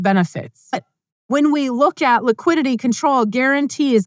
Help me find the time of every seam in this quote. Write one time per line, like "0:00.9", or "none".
0:00.9